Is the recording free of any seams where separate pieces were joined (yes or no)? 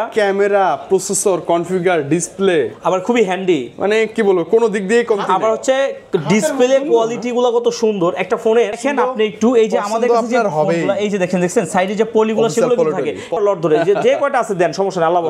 no